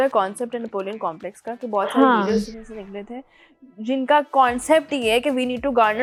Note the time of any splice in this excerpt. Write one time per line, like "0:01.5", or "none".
none